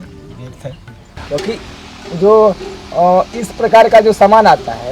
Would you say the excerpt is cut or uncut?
cut